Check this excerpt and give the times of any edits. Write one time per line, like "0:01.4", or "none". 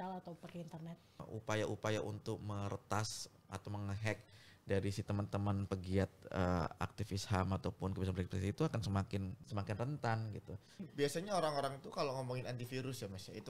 0:01.2
0:09.4
0:10.8